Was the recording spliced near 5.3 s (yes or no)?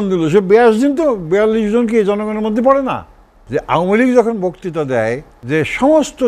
yes